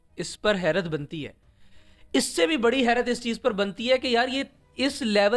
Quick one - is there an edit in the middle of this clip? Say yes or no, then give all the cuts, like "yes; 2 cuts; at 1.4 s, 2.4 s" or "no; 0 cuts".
no; 0 cuts